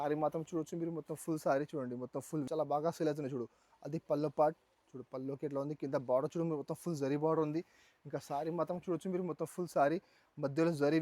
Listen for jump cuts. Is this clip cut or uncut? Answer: cut